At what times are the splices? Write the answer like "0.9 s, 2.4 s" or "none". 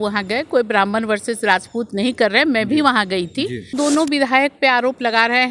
3.7 s